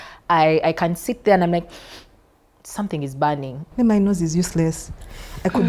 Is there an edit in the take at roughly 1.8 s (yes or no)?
no